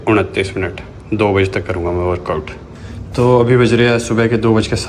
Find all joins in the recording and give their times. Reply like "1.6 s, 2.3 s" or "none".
2.6 s